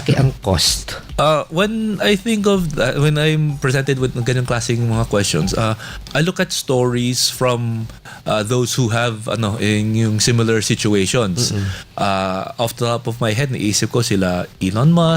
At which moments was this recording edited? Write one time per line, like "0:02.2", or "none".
0:01.0